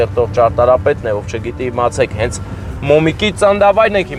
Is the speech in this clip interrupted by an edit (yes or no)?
no